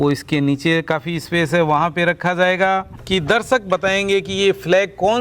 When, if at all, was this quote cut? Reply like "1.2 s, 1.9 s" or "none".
2.9 s